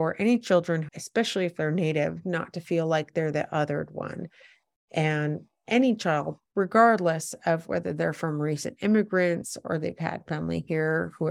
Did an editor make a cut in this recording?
yes; 1 cut; at 0.9 s

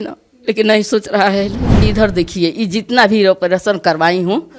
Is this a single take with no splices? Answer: no; 1 cut; at 1.8 s

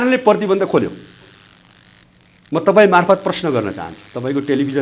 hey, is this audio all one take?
yes; 0 cuts

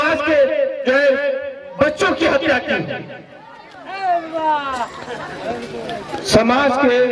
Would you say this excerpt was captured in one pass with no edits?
yes; 0 cuts

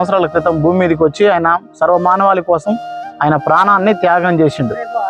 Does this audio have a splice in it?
no; 0 cuts

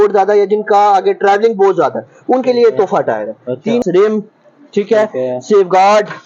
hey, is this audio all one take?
no; 1 cut; at 3.8 s

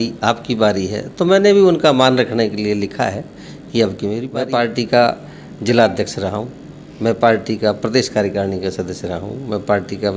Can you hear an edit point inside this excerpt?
yes; 1 cut; at 4.3 s

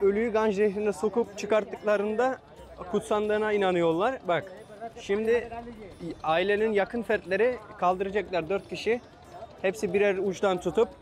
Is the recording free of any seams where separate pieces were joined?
yes; 0 cuts

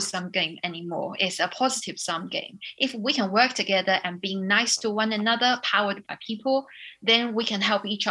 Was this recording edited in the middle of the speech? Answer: no; 0 cuts

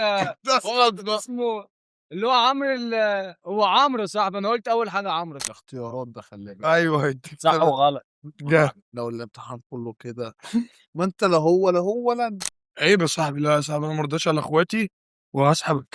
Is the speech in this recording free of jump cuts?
no; 3 cuts; at 5.4 s, 10.8 s, 12.5 s

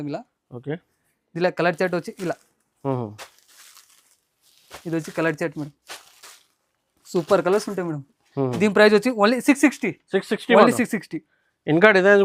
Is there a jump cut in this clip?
no; 0 cuts

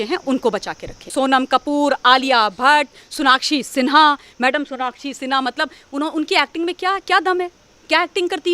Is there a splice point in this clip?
yes; 1 cut; at 1.1 s

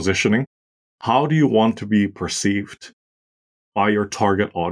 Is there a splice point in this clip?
yes; 1 cut; at 0.9 s

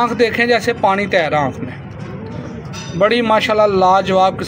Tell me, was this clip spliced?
no; 0 cuts

